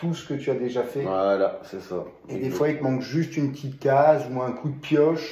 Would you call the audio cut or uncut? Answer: uncut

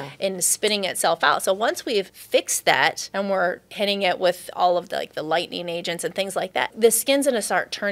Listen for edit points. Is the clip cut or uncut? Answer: cut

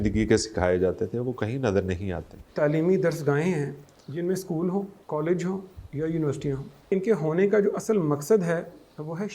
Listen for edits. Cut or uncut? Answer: cut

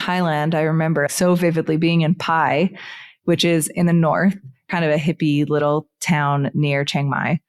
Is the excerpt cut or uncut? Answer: cut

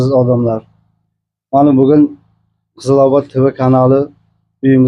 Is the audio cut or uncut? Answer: uncut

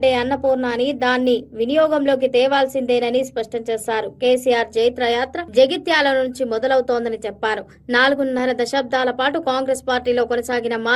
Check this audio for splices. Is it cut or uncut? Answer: cut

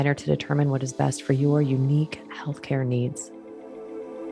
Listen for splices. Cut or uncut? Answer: cut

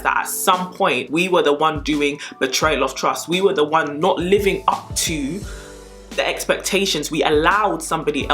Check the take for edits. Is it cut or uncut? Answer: cut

